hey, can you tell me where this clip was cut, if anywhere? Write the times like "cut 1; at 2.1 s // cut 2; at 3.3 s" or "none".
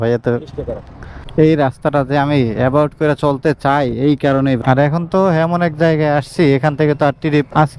cut 1; at 1.2 s // cut 2; at 4.6 s